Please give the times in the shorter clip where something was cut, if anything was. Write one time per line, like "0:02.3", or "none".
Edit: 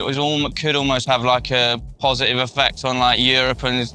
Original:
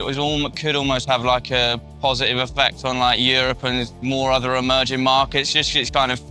none